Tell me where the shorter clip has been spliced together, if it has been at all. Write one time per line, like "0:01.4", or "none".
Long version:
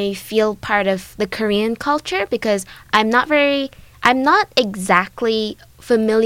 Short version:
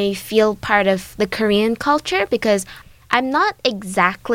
0:02.8